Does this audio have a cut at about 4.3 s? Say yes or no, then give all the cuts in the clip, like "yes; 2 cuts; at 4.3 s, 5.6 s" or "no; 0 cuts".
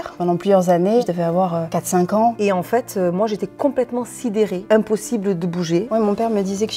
no; 3 cuts; at 1.1 s, 2.4 s, 5.9 s